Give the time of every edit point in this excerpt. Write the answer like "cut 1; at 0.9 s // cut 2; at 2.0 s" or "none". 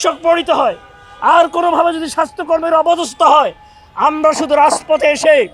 none